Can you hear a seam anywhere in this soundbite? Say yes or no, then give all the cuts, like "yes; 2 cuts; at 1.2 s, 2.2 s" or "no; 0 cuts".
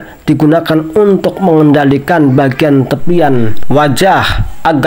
no; 0 cuts